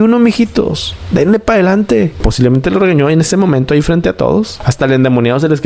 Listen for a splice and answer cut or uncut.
uncut